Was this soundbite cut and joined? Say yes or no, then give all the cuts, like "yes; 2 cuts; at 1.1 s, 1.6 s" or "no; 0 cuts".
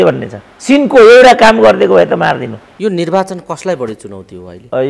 yes; 1 cut; at 2.6 s